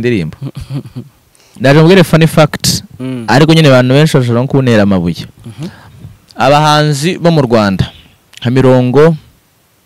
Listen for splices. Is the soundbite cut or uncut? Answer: cut